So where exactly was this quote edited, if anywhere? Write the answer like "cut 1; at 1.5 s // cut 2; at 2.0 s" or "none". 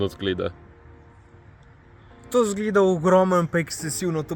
none

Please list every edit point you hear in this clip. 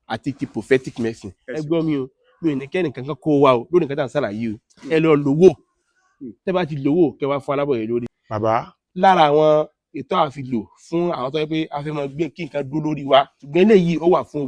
cut 1; at 1.5 s // cut 2; at 8.1 s // cut 3; at 13.4 s

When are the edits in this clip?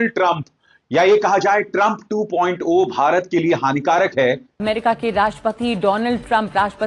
cut 1; at 4.5 s

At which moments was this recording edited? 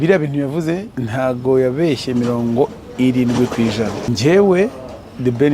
cut 1; at 1.0 s // cut 2; at 4.1 s

